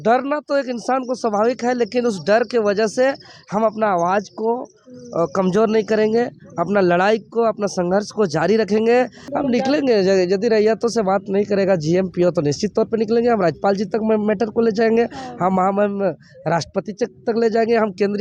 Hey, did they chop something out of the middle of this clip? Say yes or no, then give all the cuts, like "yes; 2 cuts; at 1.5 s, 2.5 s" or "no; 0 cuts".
yes; 1 cut; at 9.2 s